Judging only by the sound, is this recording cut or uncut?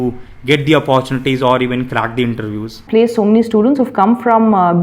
cut